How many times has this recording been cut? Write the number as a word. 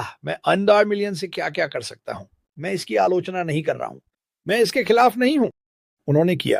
zero